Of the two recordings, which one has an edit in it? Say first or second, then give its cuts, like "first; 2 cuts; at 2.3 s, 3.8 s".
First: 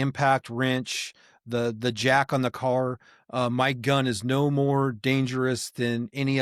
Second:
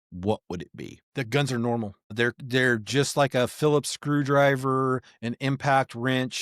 second; 2 cuts; at 1.0 s, 2.1 s